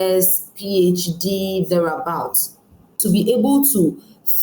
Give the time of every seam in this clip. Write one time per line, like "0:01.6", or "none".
0:03.0